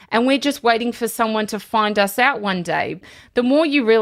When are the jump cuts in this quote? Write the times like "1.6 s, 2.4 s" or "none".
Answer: 3.0 s